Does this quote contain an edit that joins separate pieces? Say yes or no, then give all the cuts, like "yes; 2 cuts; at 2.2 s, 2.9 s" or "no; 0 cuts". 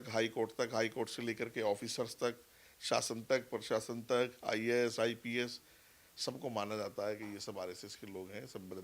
no; 0 cuts